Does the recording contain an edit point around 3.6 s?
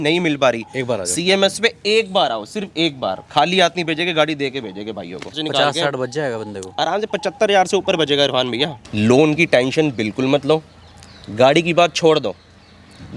no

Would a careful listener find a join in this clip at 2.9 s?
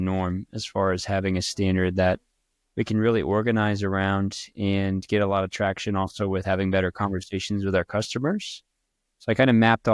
no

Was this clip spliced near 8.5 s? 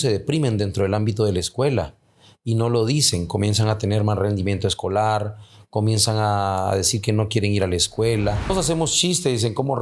yes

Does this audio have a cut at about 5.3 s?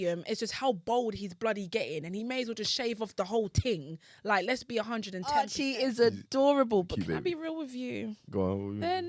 yes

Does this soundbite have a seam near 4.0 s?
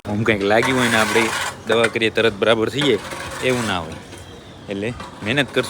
no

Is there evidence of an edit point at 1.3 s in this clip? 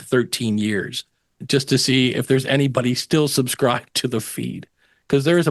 yes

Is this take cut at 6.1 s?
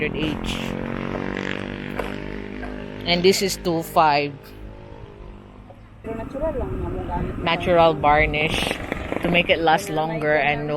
yes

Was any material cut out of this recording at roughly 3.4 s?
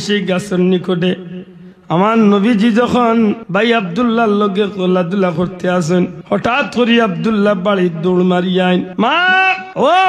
yes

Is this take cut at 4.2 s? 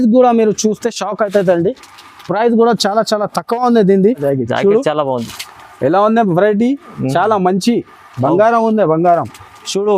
yes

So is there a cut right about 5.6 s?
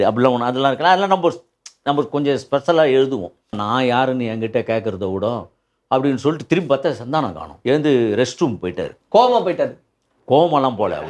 no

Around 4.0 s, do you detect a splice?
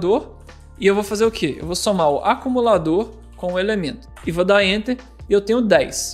yes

